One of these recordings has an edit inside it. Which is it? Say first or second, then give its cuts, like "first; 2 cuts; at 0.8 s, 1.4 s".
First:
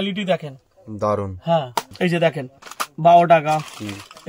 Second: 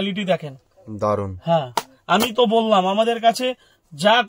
first; 1 cut; at 1.9 s